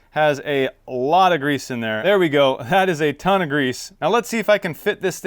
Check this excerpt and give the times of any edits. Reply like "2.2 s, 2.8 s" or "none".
1.9 s